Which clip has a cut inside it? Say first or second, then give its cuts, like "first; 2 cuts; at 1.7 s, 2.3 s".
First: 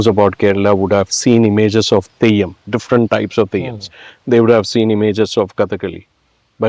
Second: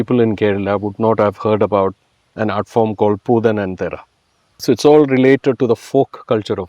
second; 1 cut; at 4.6 s